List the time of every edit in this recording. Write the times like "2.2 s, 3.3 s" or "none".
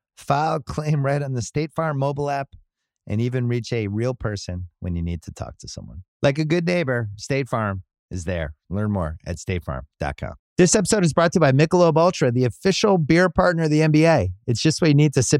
10.4 s